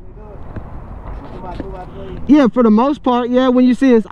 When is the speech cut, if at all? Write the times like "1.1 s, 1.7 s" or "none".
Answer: none